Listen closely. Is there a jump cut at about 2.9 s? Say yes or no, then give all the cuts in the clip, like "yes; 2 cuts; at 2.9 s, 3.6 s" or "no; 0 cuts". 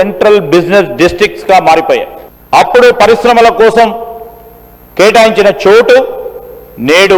no; 0 cuts